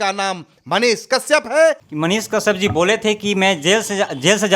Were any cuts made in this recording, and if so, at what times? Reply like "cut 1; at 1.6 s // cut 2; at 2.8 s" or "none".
cut 1; at 1.9 s